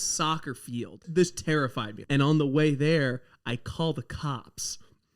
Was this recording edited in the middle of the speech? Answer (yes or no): yes